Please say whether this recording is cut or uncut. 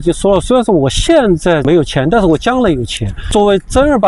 cut